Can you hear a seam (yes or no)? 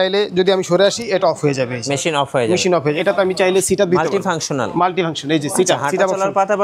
yes